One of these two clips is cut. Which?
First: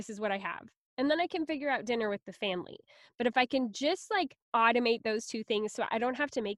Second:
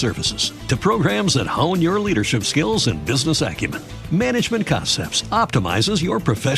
first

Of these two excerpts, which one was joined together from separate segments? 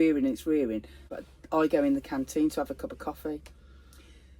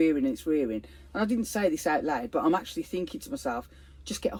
first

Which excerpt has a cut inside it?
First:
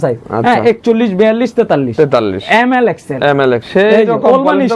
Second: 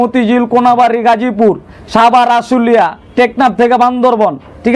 first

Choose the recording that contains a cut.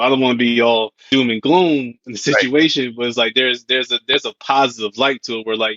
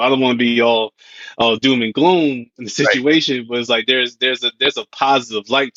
first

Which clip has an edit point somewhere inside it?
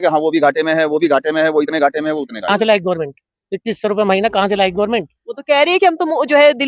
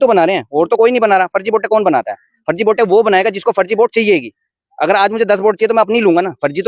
first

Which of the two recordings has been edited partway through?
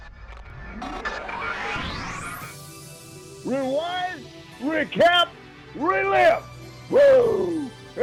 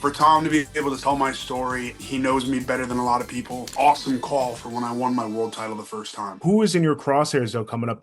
second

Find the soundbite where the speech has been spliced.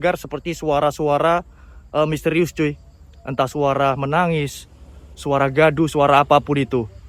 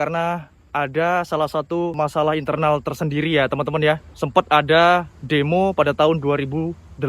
second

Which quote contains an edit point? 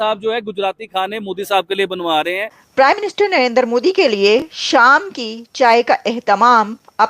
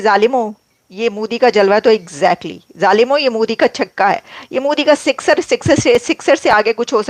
first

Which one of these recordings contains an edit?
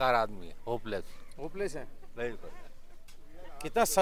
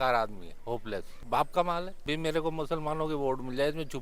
second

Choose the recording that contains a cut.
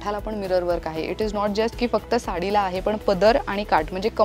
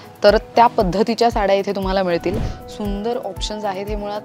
second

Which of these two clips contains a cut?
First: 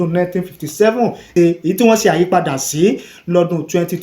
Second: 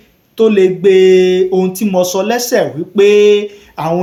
first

